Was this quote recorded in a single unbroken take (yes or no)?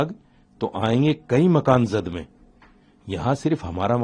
yes